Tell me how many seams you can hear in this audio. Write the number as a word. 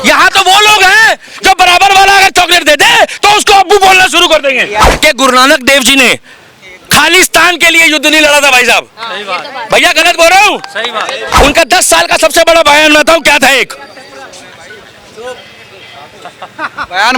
two